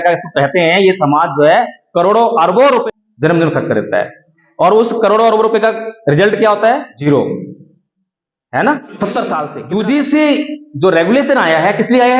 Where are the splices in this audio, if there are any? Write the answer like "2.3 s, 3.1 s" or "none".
2.8 s, 6.9 s, 9.5 s